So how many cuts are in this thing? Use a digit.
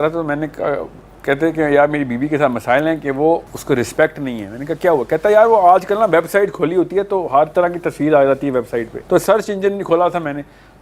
2